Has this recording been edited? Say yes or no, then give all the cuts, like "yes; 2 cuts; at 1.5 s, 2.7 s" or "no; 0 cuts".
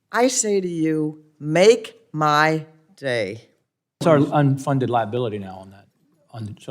yes; 1 cut; at 4.0 s